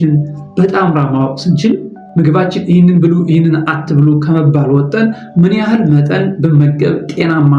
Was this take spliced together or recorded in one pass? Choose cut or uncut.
uncut